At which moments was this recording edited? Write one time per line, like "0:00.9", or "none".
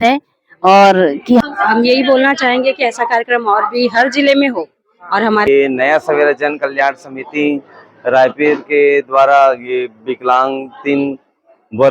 0:01.4
0:05.5